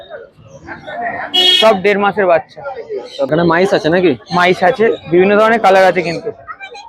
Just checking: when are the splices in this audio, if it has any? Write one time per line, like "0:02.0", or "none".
0:03.3